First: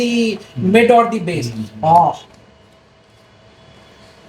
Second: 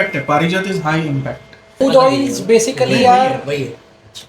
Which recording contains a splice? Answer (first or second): second